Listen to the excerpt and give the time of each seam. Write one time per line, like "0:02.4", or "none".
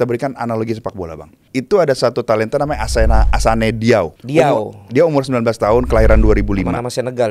0:01.4
0:04.2